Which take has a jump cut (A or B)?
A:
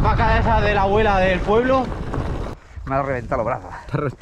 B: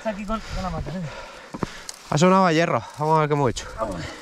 A